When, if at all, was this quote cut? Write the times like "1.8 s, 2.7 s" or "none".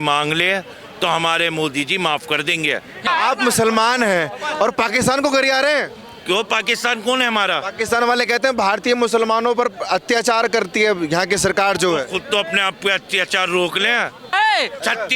3.1 s, 14.3 s